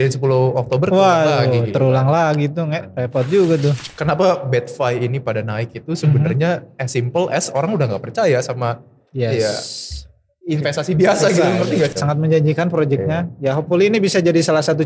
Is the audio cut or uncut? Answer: cut